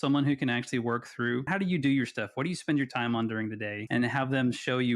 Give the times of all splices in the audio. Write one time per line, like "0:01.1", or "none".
0:01.5
0:03.7